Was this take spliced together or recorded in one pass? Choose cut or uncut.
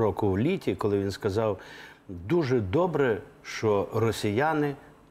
uncut